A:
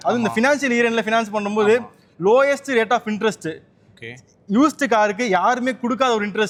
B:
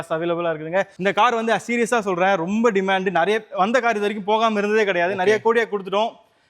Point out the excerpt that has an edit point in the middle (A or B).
B